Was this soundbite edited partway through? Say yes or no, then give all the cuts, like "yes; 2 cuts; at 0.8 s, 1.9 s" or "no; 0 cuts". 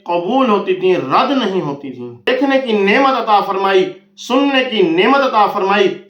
yes; 1 cut; at 2.3 s